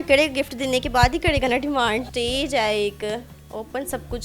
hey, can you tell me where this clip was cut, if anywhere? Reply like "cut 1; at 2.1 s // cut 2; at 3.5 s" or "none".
cut 1; at 2.1 s